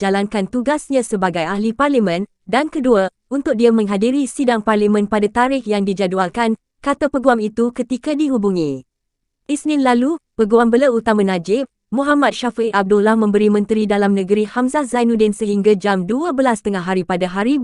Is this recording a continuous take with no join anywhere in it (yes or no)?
no